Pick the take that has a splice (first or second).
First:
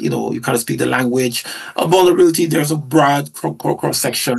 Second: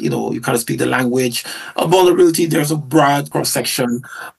second